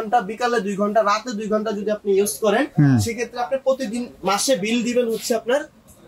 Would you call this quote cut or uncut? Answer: uncut